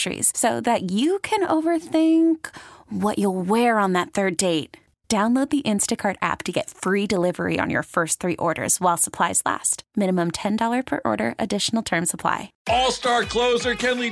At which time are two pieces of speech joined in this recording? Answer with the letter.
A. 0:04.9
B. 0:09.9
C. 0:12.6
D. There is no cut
C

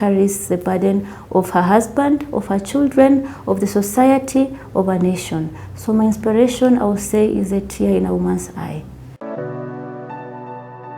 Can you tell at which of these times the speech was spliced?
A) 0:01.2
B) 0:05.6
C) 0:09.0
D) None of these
C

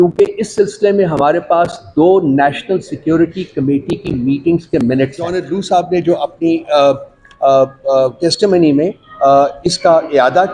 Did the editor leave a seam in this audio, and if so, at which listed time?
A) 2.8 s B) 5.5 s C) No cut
B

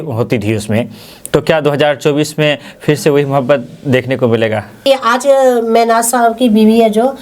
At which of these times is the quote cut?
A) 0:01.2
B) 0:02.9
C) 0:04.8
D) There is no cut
C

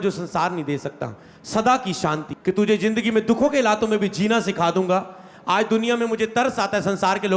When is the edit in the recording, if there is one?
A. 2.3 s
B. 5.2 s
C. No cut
A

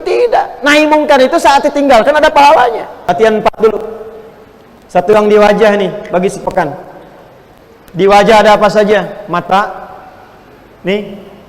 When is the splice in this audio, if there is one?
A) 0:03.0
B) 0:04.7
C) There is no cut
A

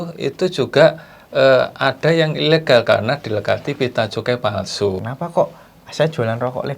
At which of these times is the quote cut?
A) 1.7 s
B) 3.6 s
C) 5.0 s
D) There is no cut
C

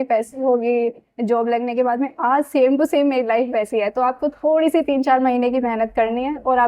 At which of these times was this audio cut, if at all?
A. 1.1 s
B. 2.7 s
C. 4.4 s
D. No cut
D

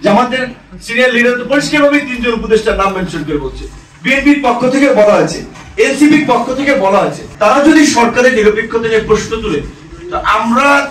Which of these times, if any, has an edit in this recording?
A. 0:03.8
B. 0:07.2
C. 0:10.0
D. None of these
B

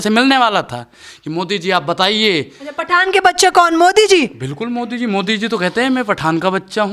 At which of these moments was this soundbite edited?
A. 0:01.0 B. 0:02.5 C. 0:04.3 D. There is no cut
D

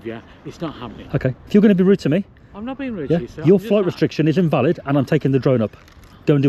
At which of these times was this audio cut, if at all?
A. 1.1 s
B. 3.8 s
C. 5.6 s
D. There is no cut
D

